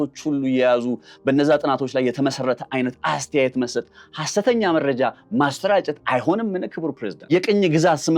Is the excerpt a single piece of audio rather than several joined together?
no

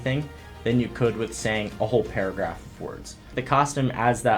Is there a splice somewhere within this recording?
yes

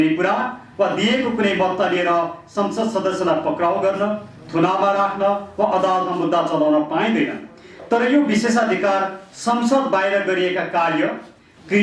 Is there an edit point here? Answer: no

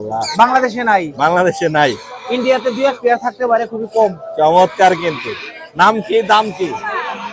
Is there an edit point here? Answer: no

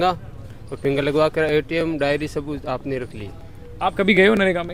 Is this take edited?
no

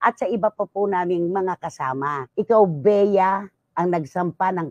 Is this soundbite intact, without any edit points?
no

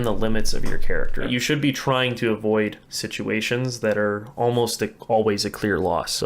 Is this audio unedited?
no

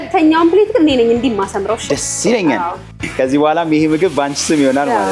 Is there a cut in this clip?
yes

